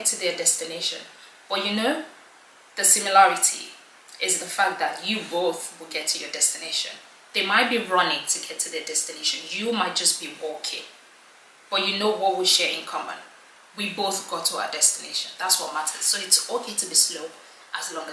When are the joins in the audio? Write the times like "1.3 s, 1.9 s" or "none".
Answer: none